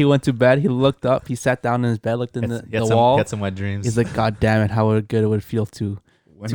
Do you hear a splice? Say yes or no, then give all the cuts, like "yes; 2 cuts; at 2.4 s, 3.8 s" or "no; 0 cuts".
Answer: no; 0 cuts